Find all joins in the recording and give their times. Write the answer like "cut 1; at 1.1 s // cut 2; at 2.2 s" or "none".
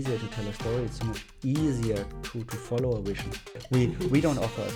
cut 1; at 3.7 s